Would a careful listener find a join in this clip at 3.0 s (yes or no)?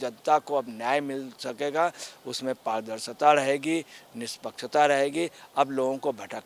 no